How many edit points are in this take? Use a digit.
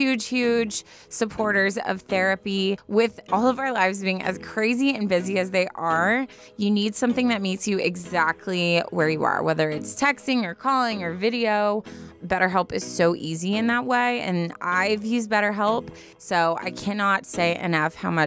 2